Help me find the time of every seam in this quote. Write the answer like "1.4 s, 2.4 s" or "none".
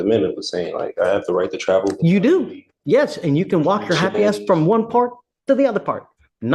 none